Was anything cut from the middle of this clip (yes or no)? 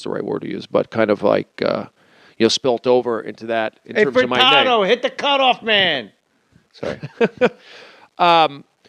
yes